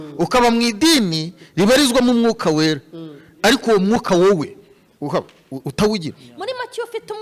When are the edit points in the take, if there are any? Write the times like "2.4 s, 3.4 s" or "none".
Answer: 6.2 s